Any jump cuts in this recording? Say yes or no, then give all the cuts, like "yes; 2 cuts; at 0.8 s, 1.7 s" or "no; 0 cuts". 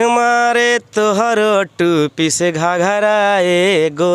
no; 0 cuts